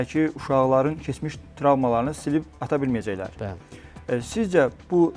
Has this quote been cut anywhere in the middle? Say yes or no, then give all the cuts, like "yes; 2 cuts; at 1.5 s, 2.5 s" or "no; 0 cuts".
no; 0 cuts